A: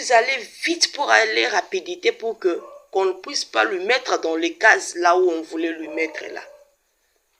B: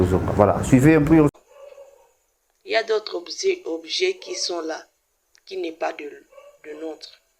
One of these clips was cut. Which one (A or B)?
B